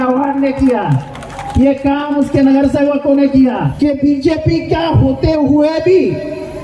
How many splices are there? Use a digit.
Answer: 1